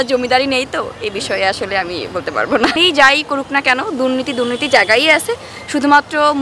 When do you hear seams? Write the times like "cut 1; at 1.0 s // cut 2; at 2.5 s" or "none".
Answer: cut 1; at 2.7 s